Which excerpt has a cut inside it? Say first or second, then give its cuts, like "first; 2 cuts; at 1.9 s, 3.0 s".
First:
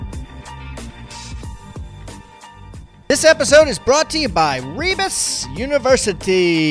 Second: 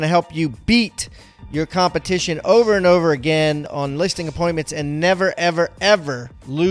first; 2 cuts; at 1.1 s, 2.9 s